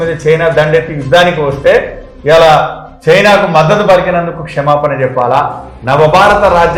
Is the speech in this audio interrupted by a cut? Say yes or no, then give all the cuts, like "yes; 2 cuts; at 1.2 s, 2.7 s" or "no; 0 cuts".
no; 0 cuts